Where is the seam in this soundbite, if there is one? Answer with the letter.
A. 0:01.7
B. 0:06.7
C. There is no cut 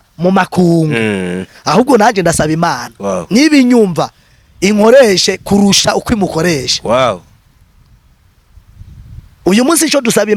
C